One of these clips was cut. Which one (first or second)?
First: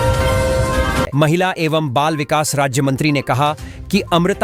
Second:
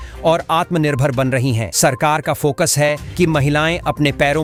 first